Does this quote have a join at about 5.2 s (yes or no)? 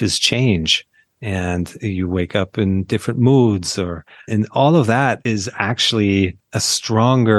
yes